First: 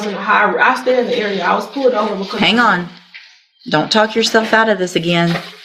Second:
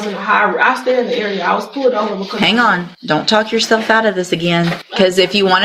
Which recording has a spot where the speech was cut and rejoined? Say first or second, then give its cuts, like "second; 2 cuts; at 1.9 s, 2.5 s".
second; 2 cuts; at 2.9 s, 4.8 s